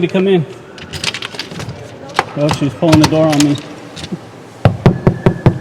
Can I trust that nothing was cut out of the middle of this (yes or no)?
yes